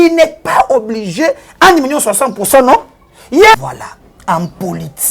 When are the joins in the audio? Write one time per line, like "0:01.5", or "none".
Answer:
0:03.6